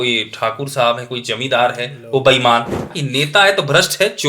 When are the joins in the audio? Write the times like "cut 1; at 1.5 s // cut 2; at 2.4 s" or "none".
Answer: cut 1; at 3.0 s